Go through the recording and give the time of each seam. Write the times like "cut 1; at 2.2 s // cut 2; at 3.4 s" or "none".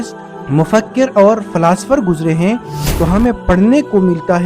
cut 1; at 2.8 s